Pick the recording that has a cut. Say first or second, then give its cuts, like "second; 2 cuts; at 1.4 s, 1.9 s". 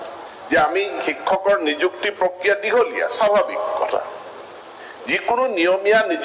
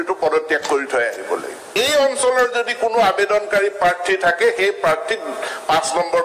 second; 1 cut; at 1.7 s